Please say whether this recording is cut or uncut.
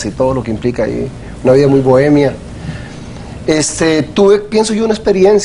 cut